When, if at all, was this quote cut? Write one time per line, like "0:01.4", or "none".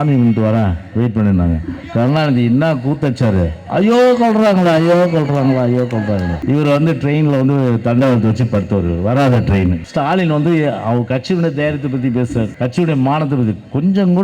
0:06.4
0:09.8
0:12.5